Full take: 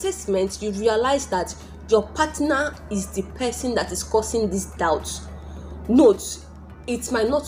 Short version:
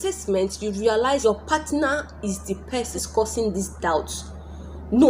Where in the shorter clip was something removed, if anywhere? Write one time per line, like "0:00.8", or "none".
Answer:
0:01.2
0:02.9